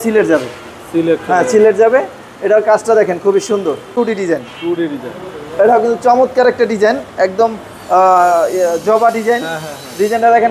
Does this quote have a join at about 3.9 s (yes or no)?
yes